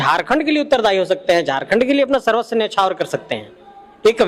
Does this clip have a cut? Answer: no; 0 cuts

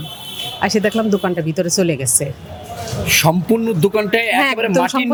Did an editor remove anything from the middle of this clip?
no; 0 cuts

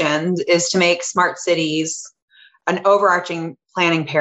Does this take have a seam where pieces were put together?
yes; 1 cut; at 2.6 s

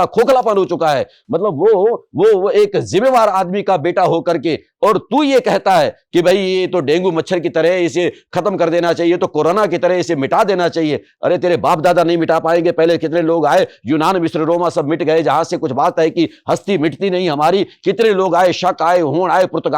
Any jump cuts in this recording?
no; 0 cuts

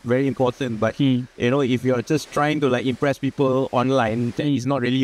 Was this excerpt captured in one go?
yes; 0 cuts

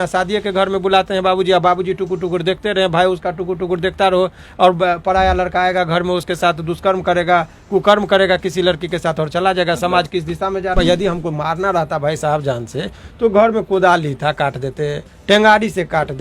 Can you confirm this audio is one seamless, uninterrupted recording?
no; 1 cut; at 10.8 s

